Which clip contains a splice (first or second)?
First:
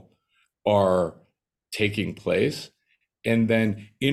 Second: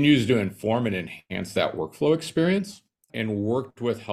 second